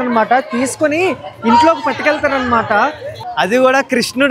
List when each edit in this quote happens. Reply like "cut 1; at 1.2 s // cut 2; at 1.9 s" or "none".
cut 1; at 3.1 s

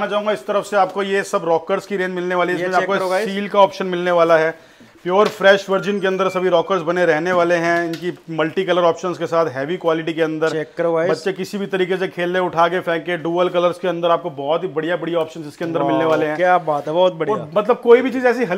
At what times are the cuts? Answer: none

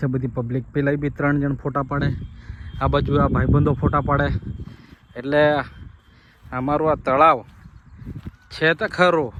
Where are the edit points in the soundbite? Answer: none

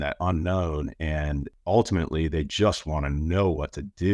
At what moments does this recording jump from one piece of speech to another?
cut 1; at 1.5 s

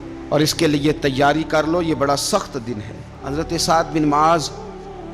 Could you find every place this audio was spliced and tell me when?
cut 1; at 3.2 s

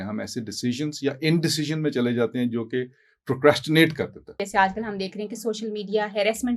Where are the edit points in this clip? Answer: cut 1; at 4.3 s

